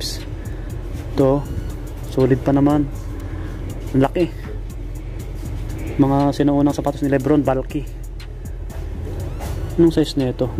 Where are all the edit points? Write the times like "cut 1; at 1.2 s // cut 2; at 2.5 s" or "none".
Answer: none